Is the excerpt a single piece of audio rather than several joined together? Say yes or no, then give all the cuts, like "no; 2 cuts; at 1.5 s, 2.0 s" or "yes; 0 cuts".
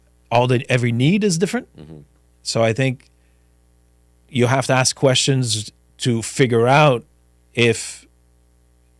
yes; 0 cuts